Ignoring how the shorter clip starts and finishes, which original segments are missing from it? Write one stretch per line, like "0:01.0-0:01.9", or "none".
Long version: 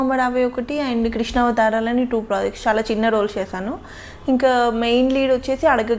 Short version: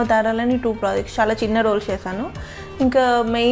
none